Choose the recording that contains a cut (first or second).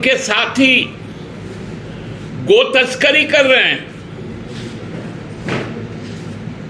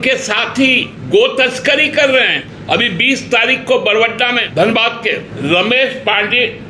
second